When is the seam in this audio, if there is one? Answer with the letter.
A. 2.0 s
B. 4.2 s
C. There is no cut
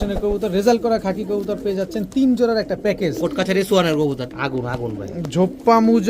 B